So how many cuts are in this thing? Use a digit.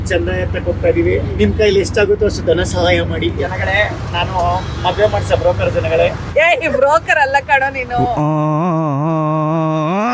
2